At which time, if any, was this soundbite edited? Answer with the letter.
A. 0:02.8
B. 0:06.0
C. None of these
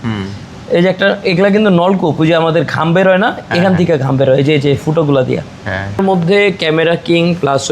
B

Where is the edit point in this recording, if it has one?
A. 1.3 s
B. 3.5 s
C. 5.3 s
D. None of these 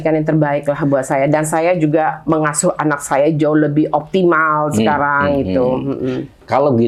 D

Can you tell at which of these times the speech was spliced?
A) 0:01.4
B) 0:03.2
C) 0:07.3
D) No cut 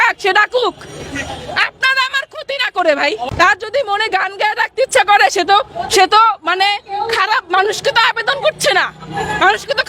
B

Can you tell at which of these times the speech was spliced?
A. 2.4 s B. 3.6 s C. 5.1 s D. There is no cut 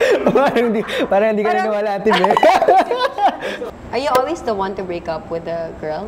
B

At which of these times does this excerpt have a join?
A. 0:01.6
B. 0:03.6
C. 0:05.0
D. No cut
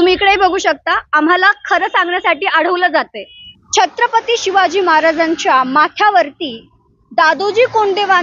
B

